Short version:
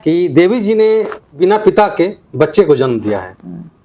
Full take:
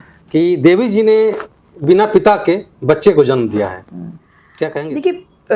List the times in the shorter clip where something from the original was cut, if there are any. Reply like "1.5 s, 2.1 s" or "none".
1.2 s